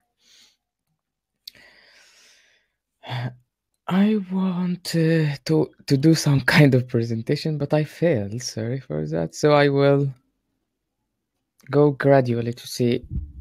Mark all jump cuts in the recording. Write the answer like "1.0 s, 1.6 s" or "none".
5.0 s